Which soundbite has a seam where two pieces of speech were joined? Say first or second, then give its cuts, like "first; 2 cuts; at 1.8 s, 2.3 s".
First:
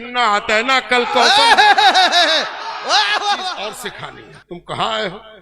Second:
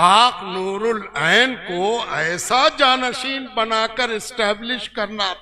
first; 1 cut; at 3.7 s